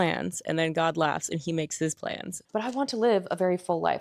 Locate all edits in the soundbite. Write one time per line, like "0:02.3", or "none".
0:02.4